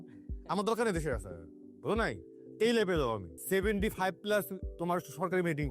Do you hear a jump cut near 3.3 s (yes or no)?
yes